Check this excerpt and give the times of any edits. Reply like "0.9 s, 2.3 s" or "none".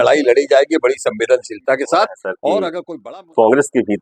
2.8 s